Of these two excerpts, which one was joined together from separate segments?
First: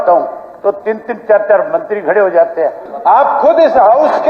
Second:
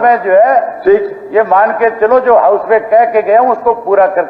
first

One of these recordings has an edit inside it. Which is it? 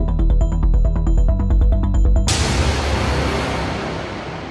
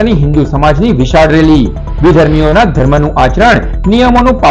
first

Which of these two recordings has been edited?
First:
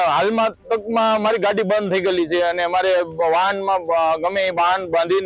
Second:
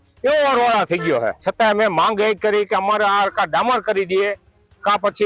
second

